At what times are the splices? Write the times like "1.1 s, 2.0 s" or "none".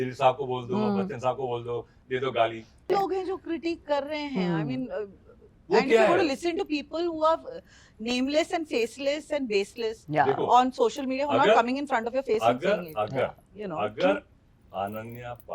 2.9 s